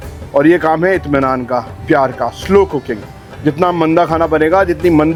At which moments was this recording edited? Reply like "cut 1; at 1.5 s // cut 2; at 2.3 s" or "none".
none